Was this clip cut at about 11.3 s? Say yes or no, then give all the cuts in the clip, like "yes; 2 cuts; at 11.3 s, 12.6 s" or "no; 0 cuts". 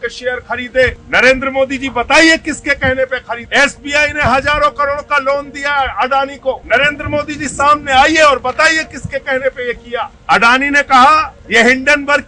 yes; 5 cuts; at 1.0 s, 3.4 s, 6.6 s, 10.1 s, 11.3 s